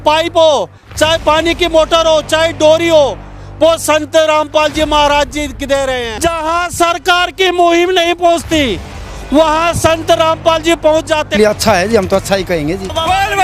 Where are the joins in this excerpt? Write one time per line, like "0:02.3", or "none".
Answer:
0:11.4